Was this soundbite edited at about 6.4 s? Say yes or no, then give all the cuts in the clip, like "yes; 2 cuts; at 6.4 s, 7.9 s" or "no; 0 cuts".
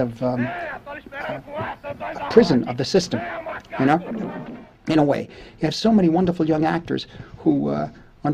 yes; 1 cut; at 6.4 s